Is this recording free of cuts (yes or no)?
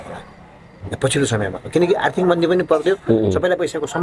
yes